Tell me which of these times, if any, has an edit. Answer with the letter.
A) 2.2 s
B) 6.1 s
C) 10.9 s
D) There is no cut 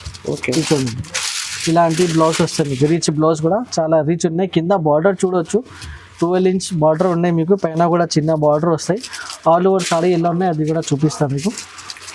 D